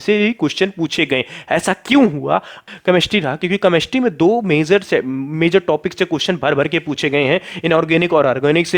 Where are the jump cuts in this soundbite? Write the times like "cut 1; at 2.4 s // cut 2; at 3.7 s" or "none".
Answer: cut 1; at 2.7 s